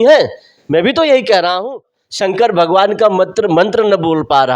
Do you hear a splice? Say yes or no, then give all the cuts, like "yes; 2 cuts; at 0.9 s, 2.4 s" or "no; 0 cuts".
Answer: yes; 1 cut; at 1.8 s